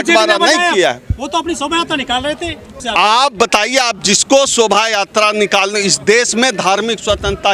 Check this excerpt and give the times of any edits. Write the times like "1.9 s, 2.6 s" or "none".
none